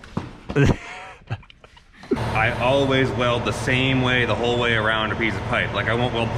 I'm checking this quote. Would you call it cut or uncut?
cut